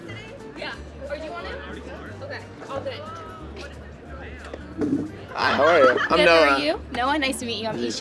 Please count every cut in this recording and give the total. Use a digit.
1